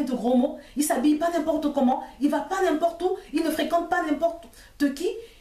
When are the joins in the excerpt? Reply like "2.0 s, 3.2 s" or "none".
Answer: none